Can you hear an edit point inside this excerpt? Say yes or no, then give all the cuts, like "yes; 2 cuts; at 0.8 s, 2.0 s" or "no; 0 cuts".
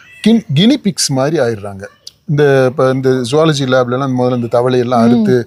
no; 0 cuts